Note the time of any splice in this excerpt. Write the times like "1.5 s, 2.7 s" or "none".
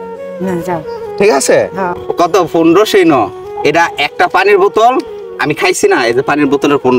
2.0 s, 3.4 s